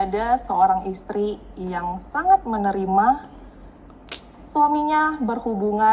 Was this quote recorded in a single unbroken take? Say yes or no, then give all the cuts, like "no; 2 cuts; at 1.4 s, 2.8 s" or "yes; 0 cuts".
yes; 0 cuts